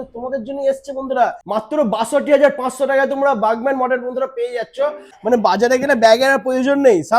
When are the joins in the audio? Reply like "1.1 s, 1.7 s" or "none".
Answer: 1.4 s, 5.1 s